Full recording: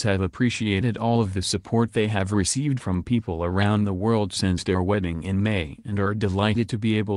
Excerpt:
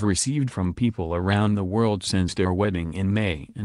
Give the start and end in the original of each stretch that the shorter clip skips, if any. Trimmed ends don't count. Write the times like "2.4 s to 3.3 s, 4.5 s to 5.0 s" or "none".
none